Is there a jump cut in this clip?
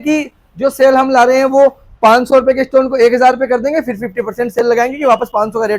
no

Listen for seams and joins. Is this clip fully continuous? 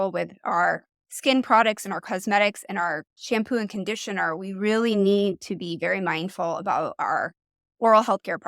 no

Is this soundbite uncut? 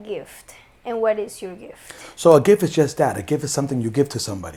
yes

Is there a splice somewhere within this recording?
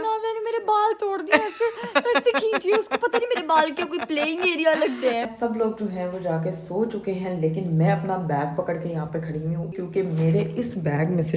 yes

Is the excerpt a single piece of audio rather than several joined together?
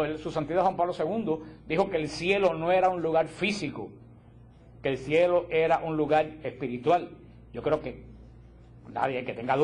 no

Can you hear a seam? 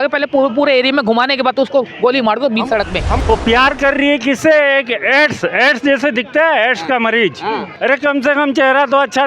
yes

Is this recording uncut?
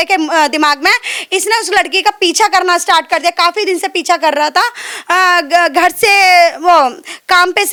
yes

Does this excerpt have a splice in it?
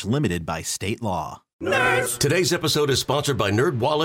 yes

